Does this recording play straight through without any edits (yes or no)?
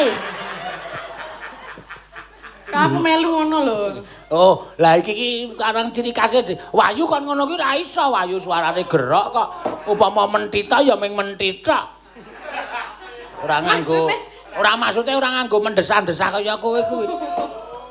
yes